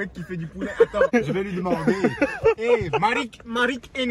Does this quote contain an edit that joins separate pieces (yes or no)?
yes